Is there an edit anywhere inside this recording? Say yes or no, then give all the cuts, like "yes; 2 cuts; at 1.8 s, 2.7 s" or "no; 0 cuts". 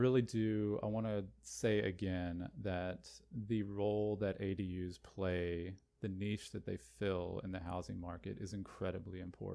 no; 0 cuts